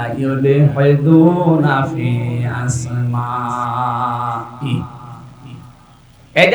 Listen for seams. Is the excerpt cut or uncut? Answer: uncut